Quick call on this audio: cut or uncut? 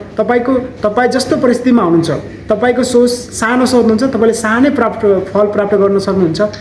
uncut